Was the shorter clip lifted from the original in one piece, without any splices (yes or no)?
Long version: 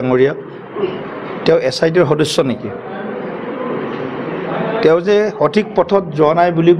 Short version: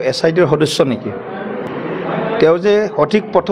no